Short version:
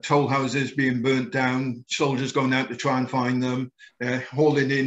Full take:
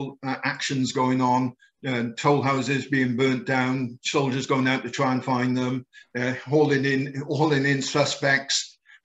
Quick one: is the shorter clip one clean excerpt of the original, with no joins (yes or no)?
yes